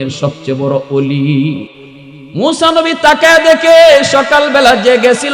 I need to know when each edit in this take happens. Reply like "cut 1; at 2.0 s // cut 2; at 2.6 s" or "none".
cut 1; at 1.7 s